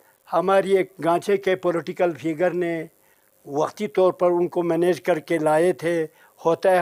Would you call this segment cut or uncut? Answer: uncut